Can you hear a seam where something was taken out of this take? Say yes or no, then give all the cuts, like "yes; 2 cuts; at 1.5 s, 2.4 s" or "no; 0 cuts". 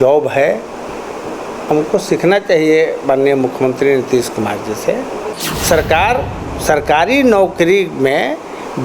yes; 1 cut; at 5.3 s